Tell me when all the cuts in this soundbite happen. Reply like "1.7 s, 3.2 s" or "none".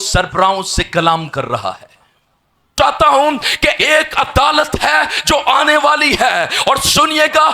2.7 s